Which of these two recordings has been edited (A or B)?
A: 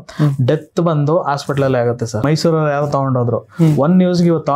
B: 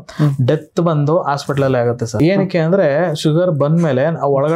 A